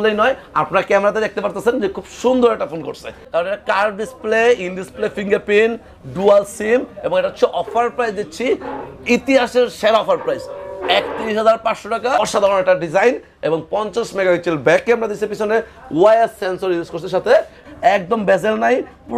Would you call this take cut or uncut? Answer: cut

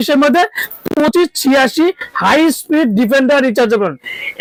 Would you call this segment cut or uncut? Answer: uncut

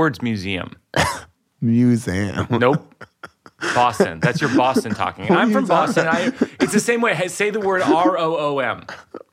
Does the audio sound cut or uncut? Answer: cut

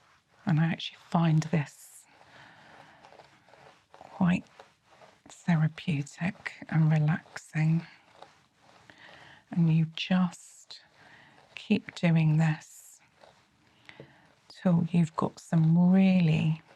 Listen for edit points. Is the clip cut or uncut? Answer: uncut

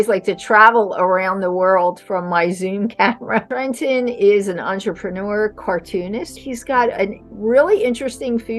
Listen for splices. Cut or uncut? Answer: cut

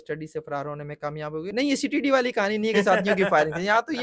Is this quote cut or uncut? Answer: cut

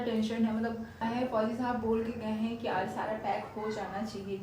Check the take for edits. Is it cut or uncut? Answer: cut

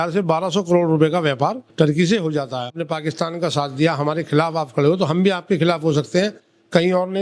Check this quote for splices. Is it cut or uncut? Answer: cut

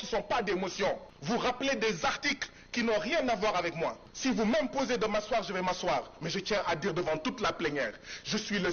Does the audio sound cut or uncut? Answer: cut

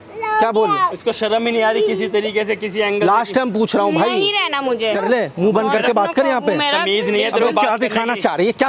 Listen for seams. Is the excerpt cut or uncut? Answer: cut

